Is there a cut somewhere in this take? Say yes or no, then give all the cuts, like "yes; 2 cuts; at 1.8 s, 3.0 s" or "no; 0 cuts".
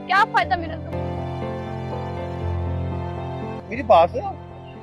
no; 0 cuts